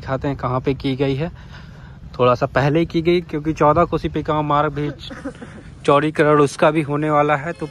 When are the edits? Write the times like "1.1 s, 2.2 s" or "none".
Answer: none

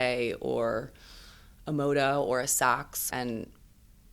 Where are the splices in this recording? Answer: 3.1 s

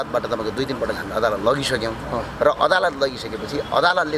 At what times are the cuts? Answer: none

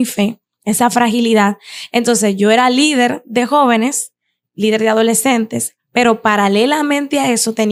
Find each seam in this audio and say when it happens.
none

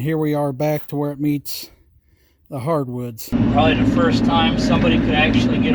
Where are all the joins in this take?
3.3 s

